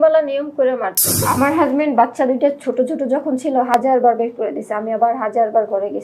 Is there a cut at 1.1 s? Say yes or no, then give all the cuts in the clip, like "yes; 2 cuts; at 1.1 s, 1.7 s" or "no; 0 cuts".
yes; 1 cut; at 1.1 s